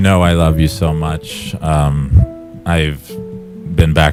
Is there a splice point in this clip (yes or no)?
no